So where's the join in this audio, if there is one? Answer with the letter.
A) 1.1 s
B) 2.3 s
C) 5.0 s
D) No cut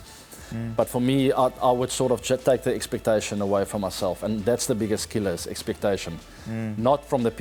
D